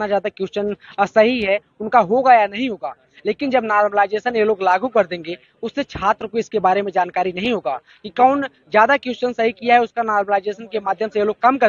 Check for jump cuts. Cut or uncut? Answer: uncut